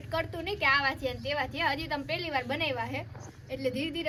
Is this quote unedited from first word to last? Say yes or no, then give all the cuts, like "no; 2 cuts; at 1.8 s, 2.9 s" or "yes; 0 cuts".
yes; 0 cuts